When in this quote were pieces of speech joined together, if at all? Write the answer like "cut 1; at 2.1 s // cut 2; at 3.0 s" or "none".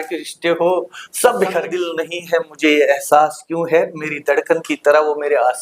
cut 1; at 1.7 s